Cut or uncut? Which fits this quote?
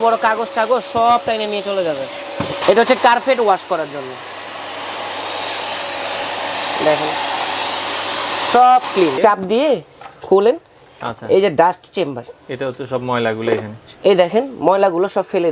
cut